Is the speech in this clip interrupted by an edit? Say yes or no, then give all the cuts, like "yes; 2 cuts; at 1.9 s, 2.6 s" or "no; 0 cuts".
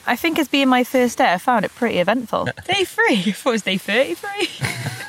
yes; 1 cut; at 2.5 s